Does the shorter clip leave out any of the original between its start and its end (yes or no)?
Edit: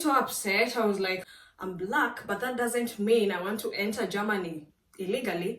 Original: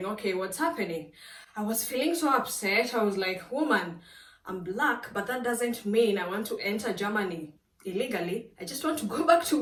yes